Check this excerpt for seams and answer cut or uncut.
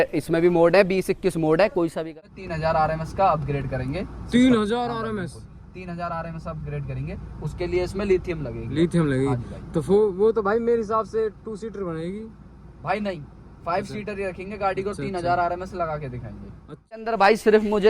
cut